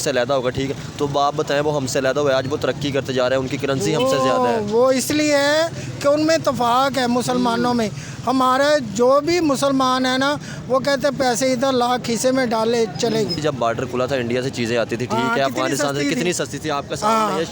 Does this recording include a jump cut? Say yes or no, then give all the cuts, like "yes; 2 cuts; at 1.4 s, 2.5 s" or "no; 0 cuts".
yes; 1 cut; at 13.4 s